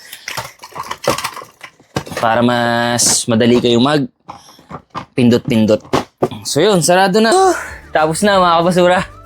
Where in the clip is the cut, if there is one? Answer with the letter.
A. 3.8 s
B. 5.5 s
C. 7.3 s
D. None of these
C